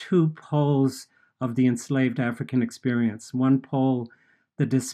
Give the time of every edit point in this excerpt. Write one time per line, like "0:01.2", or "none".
none